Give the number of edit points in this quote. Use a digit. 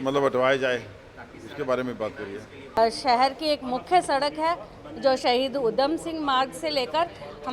1